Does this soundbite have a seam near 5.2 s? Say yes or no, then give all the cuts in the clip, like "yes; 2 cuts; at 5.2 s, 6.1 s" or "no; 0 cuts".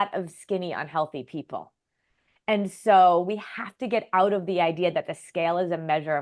no; 0 cuts